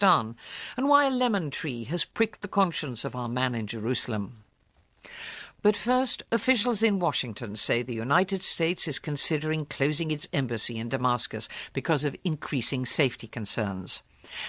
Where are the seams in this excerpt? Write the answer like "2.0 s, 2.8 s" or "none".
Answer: 10.9 s